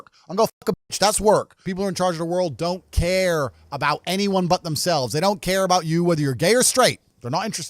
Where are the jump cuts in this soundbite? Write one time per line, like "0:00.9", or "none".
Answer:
0:01.6